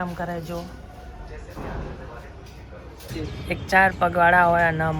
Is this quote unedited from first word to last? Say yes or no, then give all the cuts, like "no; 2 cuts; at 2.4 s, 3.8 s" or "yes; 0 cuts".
no; 1 cut; at 3.1 s